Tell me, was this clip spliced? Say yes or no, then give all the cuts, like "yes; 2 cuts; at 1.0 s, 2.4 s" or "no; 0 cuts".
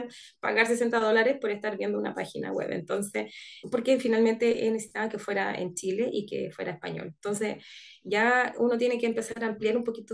no; 0 cuts